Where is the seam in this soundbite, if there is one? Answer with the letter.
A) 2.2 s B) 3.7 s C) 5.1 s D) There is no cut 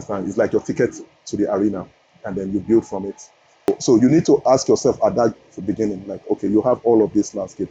B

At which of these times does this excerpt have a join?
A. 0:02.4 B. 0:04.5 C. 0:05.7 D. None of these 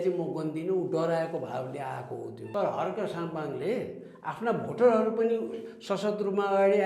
A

